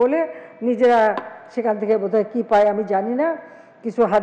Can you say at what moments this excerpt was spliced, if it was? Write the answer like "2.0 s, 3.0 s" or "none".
none

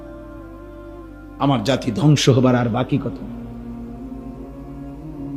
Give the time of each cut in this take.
1.1 s, 3.5 s

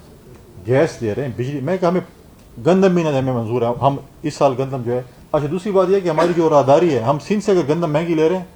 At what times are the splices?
none

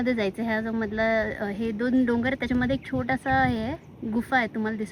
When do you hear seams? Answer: none

